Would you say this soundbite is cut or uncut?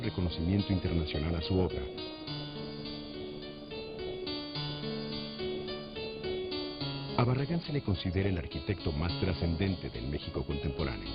cut